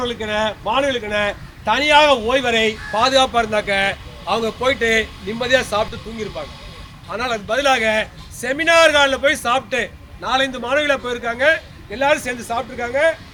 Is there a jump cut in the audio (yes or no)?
no